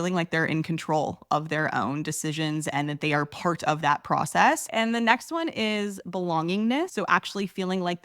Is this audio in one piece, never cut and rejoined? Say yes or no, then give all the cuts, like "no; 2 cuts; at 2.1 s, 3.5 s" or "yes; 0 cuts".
no; 2 cuts; at 4.7 s, 6.9 s